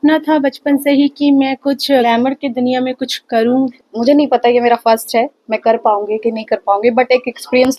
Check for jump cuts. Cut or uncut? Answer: cut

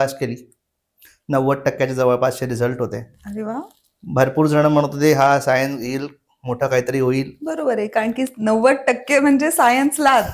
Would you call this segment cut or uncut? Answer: uncut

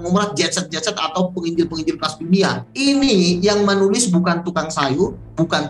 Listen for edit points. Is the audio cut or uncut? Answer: cut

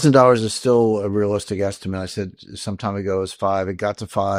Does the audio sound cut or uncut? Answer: uncut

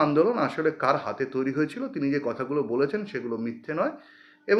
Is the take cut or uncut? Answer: uncut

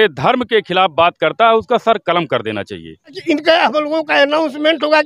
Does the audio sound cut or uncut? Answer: cut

